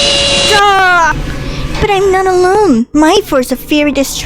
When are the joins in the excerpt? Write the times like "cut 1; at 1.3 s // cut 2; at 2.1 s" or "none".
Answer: cut 1; at 1.1 s